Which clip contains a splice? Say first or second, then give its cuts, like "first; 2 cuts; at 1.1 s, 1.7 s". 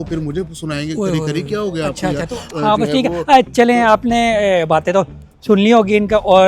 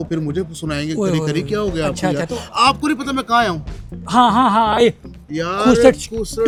first; 1 cut; at 2.5 s